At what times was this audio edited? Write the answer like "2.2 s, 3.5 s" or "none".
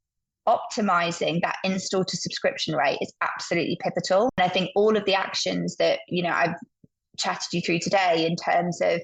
4.3 s

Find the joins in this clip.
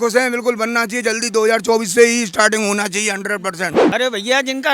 3.8 s

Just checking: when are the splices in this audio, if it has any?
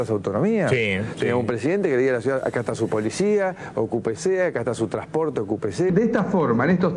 5.9 s

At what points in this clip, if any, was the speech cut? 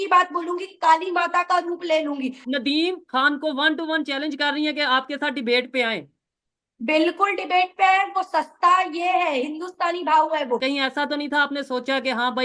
2.4 s, 10.6 s

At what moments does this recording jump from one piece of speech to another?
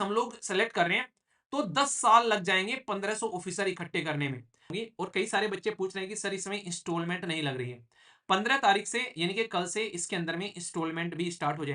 4.7 s

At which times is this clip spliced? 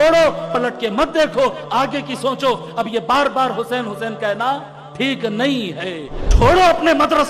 6.2 s

